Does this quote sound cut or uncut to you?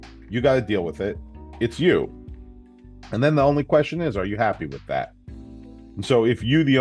uncut